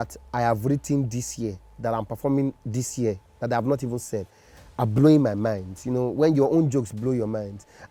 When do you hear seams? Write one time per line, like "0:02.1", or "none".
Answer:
none